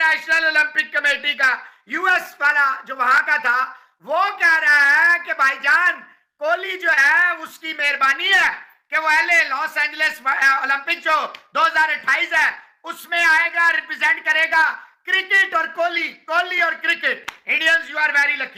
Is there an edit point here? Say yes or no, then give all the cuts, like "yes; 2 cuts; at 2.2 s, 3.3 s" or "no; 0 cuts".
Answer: no; 0 cuts